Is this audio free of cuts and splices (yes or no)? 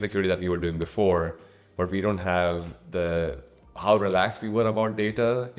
yes